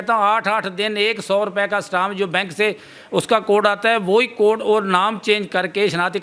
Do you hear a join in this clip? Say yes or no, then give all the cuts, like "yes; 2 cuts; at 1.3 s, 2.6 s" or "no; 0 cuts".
no; 0 cuts